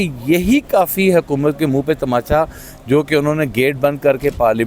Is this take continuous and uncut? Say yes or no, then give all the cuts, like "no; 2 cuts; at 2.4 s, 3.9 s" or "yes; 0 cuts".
yes; 0 cuts